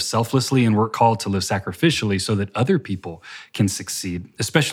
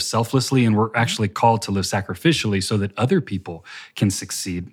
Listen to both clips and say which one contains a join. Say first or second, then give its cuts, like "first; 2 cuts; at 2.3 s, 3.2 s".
first; 1 cut; at 0.9 s